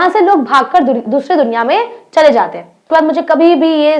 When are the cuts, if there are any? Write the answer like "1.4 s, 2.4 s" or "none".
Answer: 2.9 s